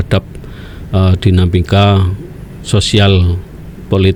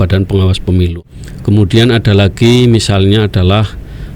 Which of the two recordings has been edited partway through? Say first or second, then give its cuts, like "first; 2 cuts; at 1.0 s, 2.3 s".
second; 1 cut; at 0.9 s